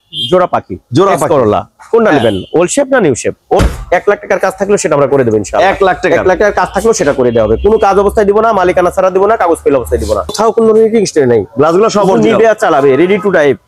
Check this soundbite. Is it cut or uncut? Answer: cut